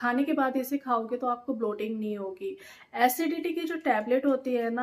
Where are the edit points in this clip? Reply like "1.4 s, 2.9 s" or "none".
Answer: none